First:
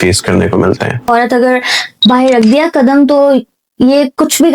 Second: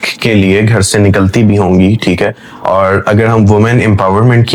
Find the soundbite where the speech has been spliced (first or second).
first